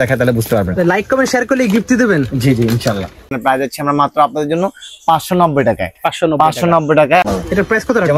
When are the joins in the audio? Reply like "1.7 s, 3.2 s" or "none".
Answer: 3.4 s, 7.2 s